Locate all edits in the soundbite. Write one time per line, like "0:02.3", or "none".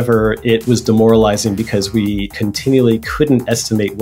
0:02.4